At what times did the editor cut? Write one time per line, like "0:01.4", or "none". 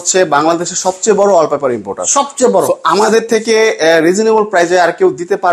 none